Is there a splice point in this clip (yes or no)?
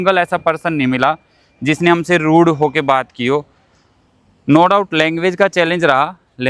no